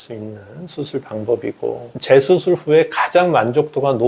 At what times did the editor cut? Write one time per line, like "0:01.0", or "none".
0:01.9